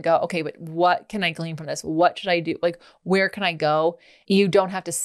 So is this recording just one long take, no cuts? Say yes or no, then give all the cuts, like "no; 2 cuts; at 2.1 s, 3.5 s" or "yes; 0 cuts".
no; 1 cut; at 4.1 s